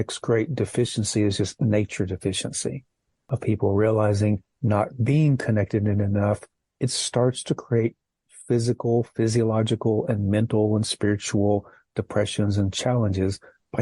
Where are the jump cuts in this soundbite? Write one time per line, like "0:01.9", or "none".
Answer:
0:03.3